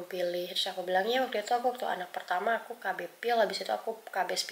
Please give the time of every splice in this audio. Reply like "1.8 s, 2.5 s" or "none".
none